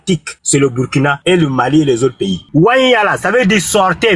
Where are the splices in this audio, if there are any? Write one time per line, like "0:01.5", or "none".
0:02.5